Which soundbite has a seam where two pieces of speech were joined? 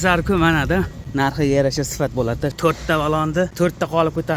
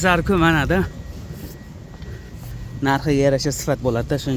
first; 3 cuts; at 1.0 s, 2.5 s, 3.5 s

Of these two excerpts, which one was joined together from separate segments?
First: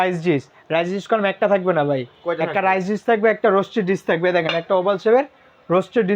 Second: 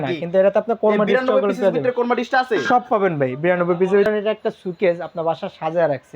second; 1 cut; at 4.1 s

